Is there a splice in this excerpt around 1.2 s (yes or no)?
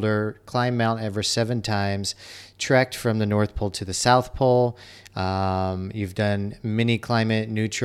no